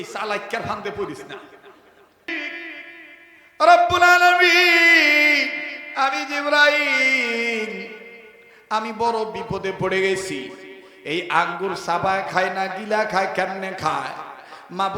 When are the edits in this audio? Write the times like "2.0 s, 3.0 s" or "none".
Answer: 2.4 s